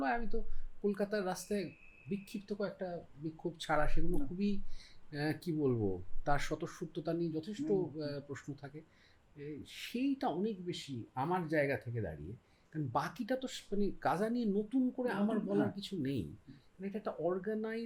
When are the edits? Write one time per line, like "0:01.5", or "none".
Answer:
none